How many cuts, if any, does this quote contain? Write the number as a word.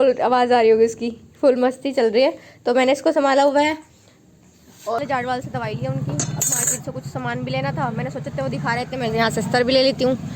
one